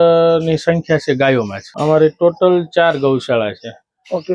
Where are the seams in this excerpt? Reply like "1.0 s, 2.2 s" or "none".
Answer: 1.6 s